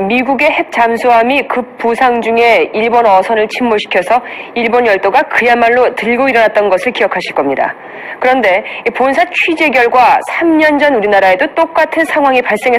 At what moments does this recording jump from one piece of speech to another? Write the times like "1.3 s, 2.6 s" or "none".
none